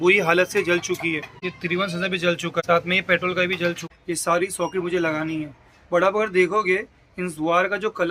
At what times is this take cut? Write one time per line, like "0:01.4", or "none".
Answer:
0:01.3
0:02.6
0:03.8